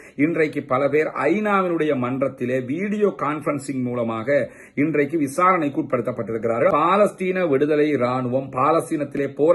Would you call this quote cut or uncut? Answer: cut